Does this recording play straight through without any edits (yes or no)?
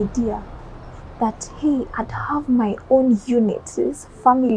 yes